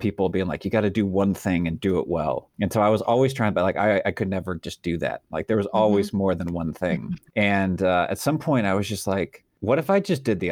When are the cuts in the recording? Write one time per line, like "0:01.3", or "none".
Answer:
0:02.5
0:07.2
0:09.4